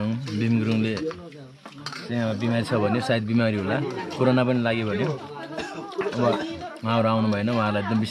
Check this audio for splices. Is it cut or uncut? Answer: uncut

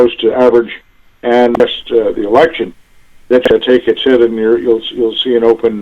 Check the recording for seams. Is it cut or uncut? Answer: cut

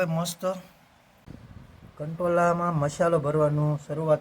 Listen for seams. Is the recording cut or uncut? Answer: cut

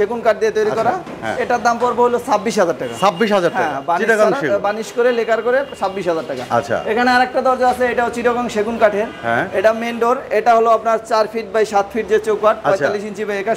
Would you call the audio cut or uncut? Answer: uncut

